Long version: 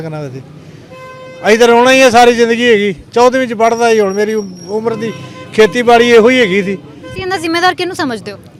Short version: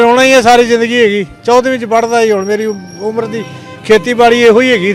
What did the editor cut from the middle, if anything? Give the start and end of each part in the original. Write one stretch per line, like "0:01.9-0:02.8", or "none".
none